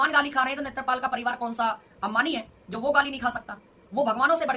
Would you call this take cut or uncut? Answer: uncut